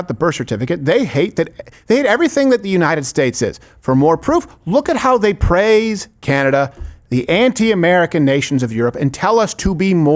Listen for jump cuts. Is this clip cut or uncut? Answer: uncut